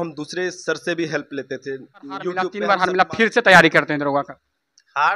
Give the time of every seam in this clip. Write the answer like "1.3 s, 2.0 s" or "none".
2.6 s